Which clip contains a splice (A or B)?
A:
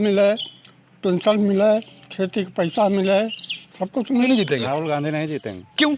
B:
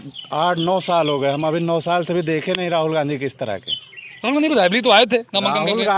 A